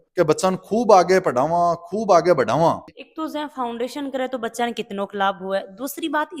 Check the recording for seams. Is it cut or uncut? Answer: cut